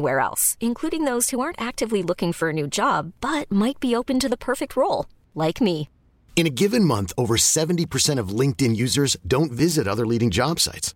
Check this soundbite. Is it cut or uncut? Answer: uncut